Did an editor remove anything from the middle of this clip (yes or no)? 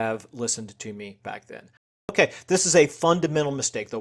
yes